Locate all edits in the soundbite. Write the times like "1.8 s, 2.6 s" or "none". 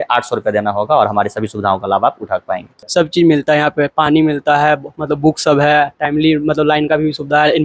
2.7 s